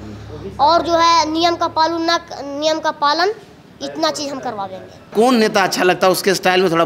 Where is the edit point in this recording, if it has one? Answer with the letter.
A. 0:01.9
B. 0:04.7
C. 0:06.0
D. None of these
D